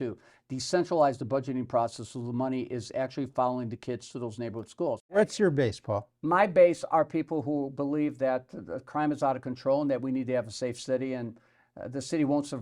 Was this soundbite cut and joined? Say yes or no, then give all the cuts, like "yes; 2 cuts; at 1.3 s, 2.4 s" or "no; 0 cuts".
yes; 1 cut; at 5.2 s